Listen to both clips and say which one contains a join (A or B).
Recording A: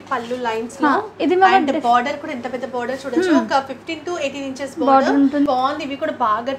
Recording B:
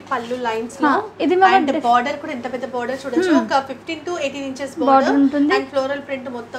A